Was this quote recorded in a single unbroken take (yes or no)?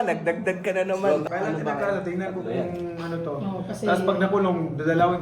no